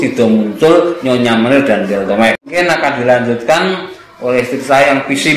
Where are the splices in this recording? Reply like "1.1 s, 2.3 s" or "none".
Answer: 2.5 s